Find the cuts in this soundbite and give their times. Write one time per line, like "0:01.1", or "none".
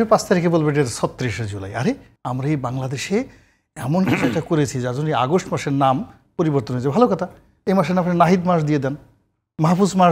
0:02.1